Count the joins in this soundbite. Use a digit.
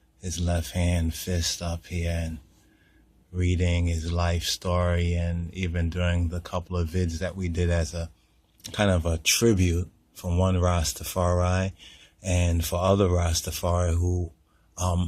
1